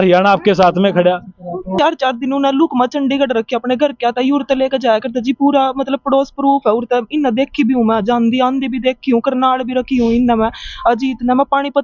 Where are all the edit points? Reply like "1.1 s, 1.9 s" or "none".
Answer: 1.7 s